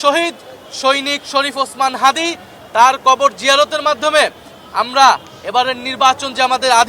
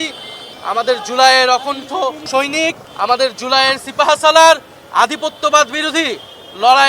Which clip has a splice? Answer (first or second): second